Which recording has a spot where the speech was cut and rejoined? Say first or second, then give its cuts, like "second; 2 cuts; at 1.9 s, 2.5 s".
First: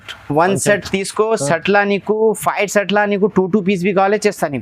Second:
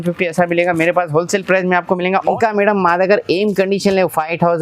second; 1 cut; at 2.4 s